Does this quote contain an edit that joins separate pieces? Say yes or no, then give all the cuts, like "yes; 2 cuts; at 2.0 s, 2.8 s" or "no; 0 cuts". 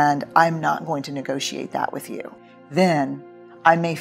yes; 1 cut; at 2.3 s